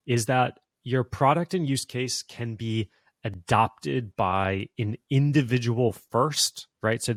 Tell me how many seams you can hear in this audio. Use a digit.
0